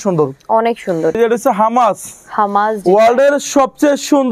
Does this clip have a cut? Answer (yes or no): yes